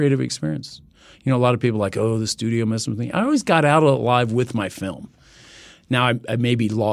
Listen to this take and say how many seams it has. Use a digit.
0